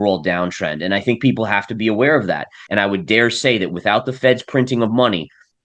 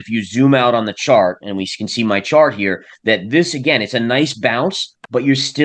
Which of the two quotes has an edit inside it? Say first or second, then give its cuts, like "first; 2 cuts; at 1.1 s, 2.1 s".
first; 1 cut; at 2.6 s